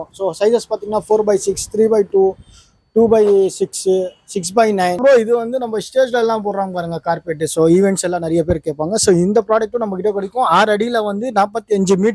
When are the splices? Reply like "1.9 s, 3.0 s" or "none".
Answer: 5.0 s